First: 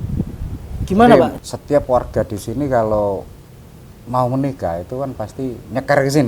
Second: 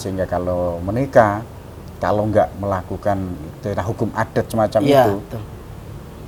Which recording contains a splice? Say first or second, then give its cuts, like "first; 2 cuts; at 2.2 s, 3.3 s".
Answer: first; 1 cut; at 1.3 s